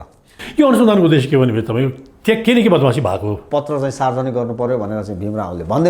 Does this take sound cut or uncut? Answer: cut